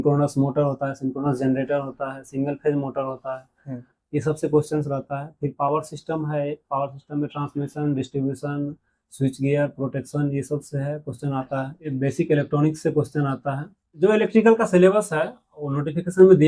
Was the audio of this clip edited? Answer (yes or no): yes